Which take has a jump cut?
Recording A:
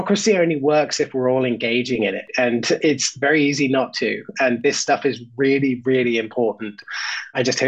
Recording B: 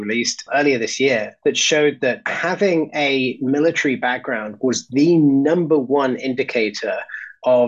B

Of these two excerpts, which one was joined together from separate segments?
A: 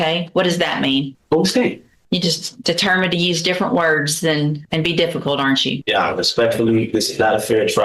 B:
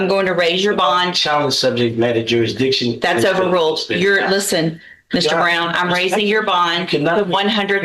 A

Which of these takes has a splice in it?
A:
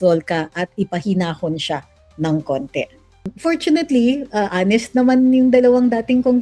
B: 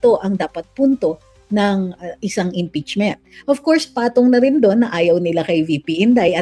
A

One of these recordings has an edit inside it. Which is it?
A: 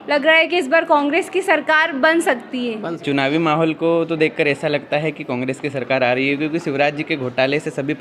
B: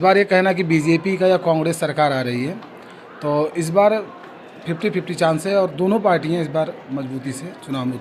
A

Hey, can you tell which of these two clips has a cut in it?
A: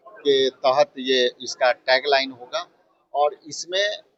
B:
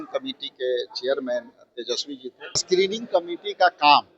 B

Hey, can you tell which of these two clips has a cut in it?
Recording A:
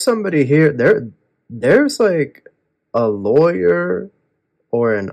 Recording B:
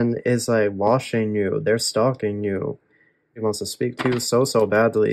B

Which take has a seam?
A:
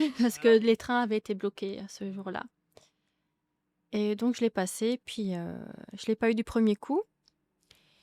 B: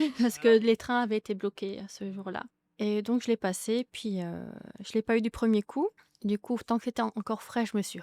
B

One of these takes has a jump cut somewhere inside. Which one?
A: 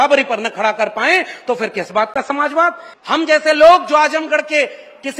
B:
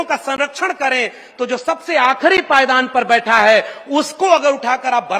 A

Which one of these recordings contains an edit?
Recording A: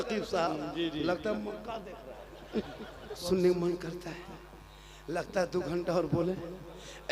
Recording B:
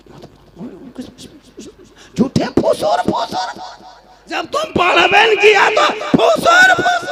A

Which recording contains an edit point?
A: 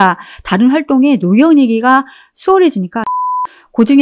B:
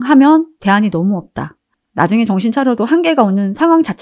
A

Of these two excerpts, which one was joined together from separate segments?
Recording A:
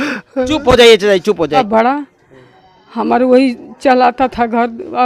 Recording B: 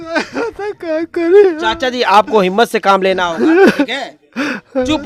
A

